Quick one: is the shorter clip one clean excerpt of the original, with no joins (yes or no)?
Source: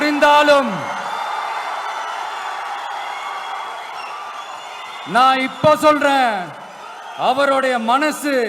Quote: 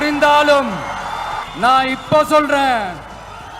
no